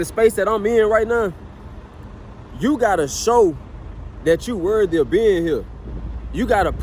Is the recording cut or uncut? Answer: uncut